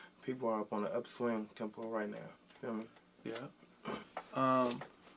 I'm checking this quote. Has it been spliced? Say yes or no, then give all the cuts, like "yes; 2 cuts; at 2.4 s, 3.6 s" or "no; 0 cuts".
yes; 1 cut; at 4.0 s